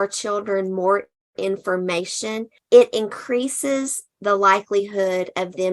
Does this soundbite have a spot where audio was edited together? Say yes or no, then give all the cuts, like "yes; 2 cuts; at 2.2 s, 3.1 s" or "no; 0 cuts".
yes; 1 cut; at 2.5 s